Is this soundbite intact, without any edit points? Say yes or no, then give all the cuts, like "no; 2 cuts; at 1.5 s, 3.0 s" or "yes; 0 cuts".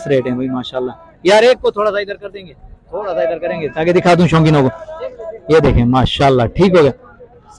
yes; 0 cuts